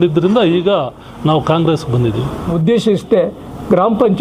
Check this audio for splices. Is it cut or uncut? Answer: cut